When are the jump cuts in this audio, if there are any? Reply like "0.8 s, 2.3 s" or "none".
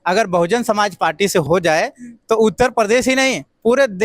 1.5 s